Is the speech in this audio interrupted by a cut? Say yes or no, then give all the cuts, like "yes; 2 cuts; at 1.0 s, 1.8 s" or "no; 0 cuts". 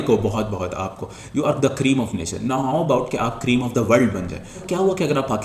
yes; 1 cut; at 4.0 s